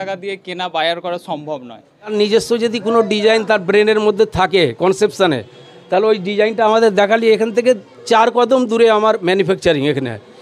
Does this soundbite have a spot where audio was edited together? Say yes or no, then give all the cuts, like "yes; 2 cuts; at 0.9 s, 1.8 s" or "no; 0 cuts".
yes; 1 cut; at 2.1 s